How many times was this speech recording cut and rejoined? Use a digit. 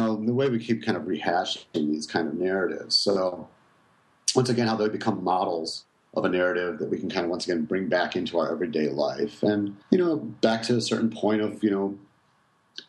1